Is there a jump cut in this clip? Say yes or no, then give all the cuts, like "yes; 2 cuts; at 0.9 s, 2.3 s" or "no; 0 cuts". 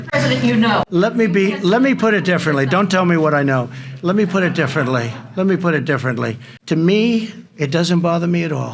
no; 0 cuts